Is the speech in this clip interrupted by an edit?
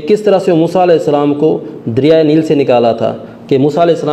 no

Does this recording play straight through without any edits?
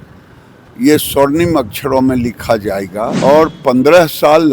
no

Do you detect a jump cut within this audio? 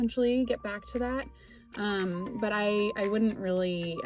no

